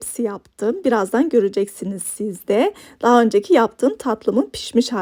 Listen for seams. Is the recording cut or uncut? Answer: uncut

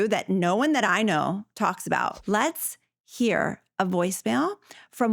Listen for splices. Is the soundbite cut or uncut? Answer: cut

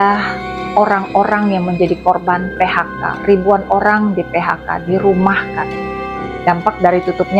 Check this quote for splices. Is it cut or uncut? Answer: uncut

